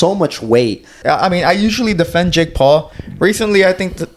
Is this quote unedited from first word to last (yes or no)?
no